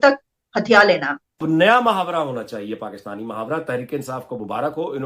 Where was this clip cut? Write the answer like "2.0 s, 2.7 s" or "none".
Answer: 1.4 s